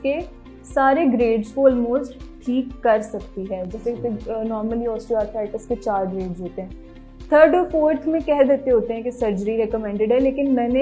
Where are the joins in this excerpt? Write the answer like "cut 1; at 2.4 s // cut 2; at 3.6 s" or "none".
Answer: none